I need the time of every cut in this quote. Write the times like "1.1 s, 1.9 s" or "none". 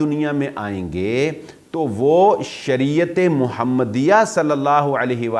none